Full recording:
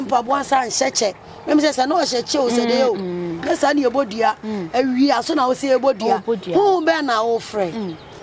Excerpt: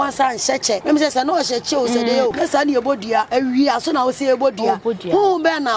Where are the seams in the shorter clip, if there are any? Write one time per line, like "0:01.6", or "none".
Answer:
0:00.8
0:02.3
0:03.3